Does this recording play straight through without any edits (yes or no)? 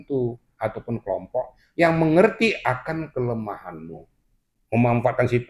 no